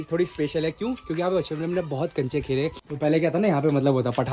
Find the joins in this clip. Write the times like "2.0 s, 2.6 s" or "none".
2.8 s